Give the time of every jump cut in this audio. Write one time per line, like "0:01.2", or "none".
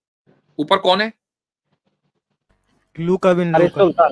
none